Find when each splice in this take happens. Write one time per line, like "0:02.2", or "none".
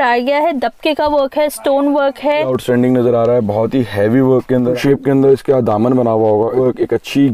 0:02.5
0:04.8
0:06.5